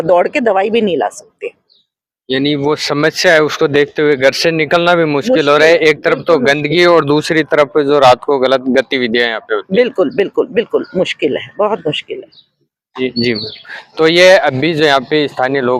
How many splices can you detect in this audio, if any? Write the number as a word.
zero